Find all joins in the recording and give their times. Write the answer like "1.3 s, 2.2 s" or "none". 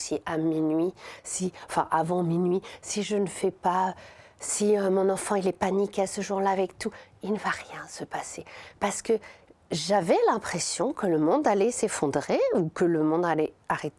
none